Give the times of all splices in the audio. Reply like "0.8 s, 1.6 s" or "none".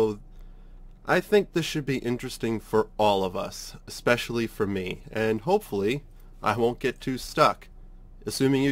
none